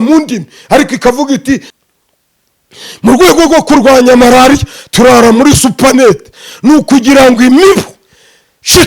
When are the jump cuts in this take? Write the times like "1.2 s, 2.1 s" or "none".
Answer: 1.7 s